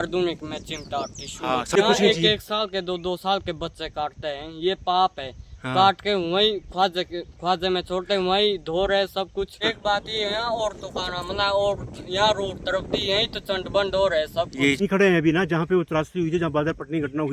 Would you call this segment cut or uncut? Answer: cut